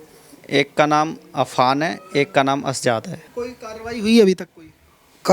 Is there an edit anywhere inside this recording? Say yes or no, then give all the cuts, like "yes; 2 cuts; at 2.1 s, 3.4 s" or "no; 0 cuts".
yes; 1 cut; at 3.2 s